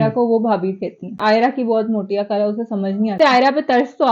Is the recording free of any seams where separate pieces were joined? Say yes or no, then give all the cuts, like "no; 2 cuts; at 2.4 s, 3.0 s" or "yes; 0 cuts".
no; 2 cuts; at 1.1 s, 3.2 s